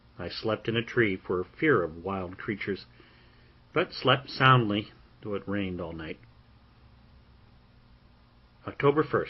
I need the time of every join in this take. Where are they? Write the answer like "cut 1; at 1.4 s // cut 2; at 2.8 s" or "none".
cut 1; at 3.3 s